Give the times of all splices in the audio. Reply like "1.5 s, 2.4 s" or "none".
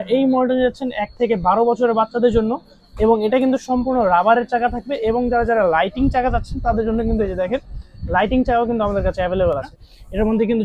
9.7 s